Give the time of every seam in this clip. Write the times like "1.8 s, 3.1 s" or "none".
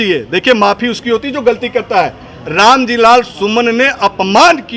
none